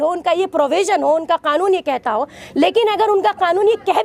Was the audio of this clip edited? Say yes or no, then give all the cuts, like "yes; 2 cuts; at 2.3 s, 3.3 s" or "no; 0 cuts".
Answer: no; 0 cuts